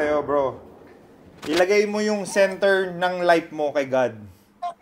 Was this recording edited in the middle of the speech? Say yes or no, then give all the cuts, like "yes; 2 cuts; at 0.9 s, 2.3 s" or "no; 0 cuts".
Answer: no; 0 cuts